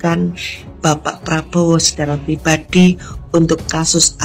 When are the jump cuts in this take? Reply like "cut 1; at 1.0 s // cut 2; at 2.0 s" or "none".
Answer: none

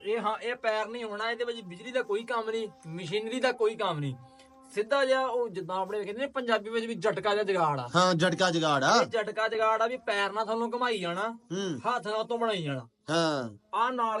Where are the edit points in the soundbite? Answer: none

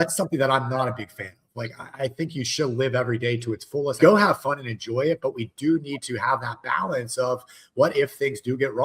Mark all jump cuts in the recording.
cut 1; at 4.0 s

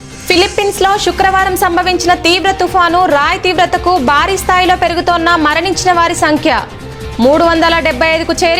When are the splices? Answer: none

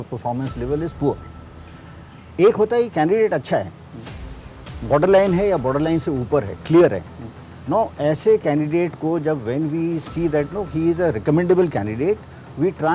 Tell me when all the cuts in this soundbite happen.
none

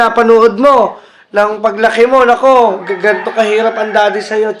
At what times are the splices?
none

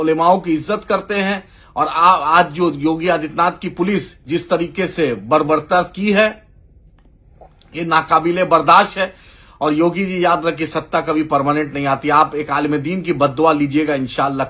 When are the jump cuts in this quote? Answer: none

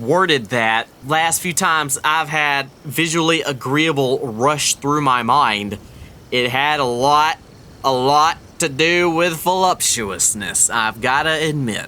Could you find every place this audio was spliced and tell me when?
cut 1; at 1.0 s

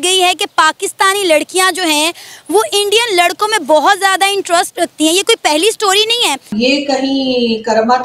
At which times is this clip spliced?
cut 1; at 6.5 s

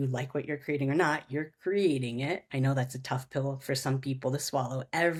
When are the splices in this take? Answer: none

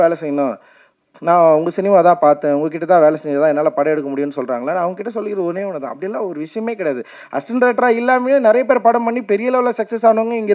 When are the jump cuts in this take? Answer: none

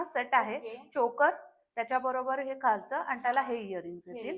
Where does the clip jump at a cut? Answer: none

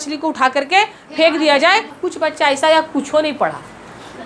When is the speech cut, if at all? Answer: cut 1; at 2.0 s

